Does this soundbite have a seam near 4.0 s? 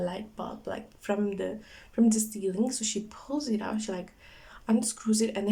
no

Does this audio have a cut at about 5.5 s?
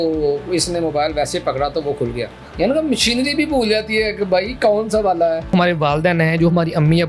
yes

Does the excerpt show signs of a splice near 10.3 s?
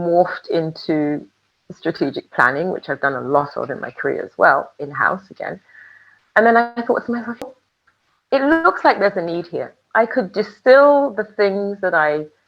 no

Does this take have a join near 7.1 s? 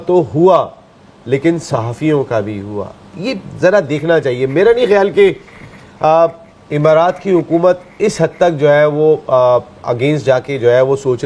no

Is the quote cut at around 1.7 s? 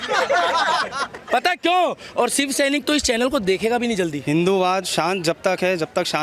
no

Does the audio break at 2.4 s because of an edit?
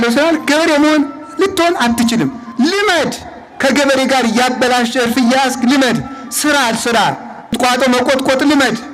yes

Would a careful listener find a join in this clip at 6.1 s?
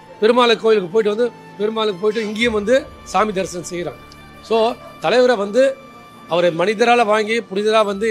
no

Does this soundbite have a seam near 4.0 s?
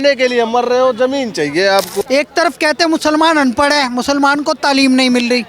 no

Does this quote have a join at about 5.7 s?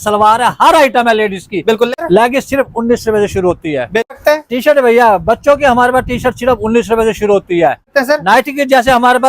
no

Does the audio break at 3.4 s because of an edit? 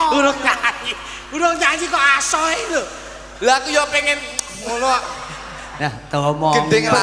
no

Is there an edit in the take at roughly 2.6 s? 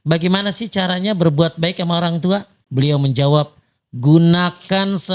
yes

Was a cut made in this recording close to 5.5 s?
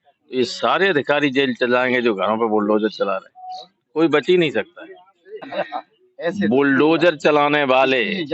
yes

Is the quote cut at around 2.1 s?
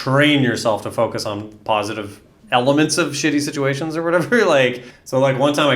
no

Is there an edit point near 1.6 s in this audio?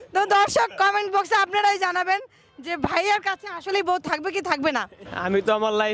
no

